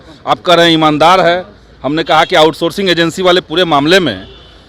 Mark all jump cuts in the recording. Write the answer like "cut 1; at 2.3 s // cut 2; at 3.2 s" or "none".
none